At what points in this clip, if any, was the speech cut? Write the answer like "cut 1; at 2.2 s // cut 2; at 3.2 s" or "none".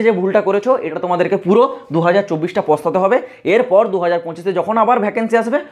none